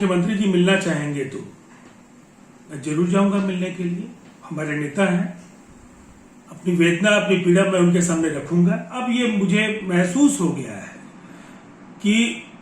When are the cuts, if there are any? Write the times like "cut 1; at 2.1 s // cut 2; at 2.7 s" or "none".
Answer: cut 1; at 9.0 s